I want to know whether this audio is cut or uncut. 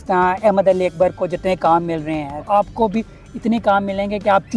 cut